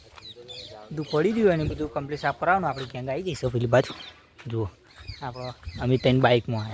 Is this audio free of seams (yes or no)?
yes